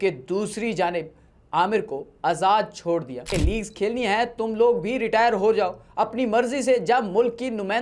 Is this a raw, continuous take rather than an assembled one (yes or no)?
no